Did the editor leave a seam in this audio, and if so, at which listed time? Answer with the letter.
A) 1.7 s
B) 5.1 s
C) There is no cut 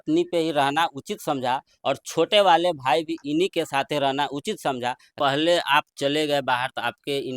B